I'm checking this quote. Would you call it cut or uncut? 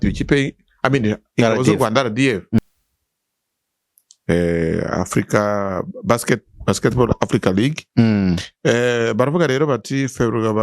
cut